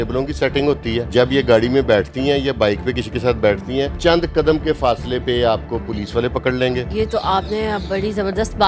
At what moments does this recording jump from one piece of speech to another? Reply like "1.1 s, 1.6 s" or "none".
1.1 s, 3.9 s, 6.9 s